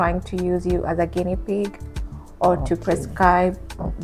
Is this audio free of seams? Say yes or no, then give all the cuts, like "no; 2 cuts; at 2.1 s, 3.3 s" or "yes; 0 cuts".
yes; 0 cuts